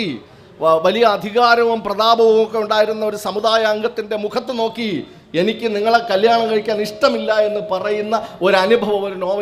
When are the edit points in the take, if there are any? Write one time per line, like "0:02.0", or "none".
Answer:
none